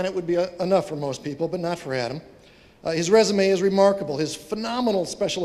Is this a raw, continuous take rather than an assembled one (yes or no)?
yes